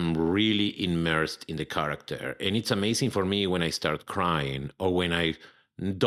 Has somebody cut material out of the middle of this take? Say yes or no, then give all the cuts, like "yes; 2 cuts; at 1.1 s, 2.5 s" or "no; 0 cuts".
no; 0 cuts